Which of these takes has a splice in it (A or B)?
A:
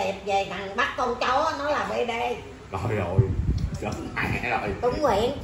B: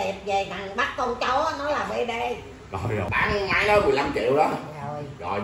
B